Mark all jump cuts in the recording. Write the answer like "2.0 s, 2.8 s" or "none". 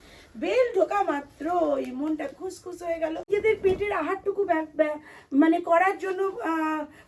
3.3 s